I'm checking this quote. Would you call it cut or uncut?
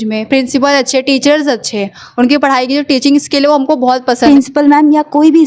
cut